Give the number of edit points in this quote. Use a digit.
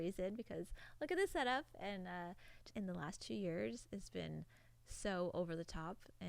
1